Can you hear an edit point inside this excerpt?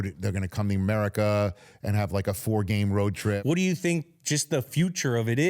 yes; 1 cut; at 3.4 s

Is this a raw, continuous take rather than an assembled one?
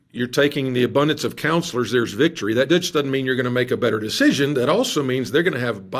yes; 0 cuts

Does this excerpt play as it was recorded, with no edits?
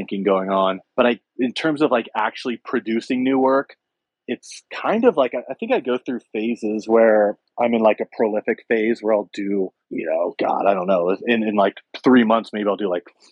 no; 3 cuts; at 1.2 s, 7.4 s, 9.8 s

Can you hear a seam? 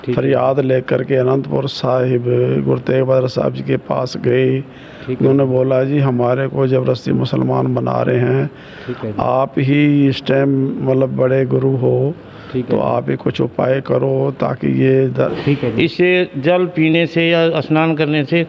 yes; 1 cut; at 15.3 s

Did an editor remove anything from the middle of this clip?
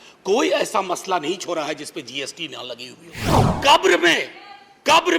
yes; 1 cut; at 3.5 s

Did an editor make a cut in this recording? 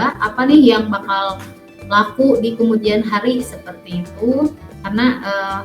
yes; 1 cut; at 4.7 s

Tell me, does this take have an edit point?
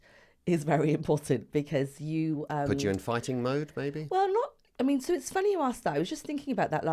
no; 0 cuts

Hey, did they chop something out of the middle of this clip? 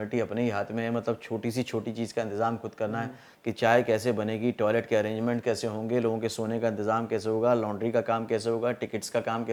no; 0 cuts

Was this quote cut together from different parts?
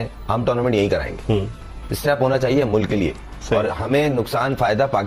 no; 0 cuts

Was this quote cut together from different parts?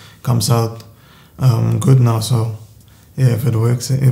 no; 0 cuts

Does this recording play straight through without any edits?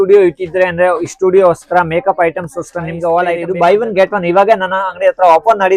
no; 1 cut; at 3.4 s

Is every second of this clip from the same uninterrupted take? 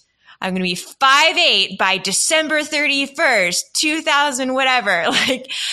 yes; 0 cuts

